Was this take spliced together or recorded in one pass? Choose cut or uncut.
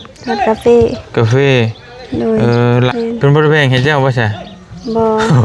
cut